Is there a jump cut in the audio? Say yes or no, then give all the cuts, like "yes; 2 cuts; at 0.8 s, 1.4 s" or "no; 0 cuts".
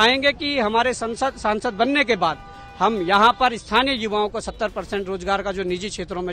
no; 0 cuts